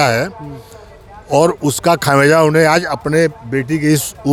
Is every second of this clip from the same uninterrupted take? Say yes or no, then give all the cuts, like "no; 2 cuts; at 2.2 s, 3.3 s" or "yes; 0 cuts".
yes; 0 cuts